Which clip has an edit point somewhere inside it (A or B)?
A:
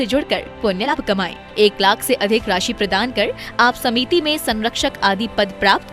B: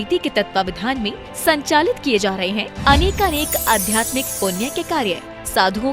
A